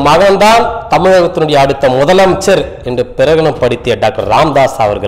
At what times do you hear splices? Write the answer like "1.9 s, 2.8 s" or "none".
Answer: none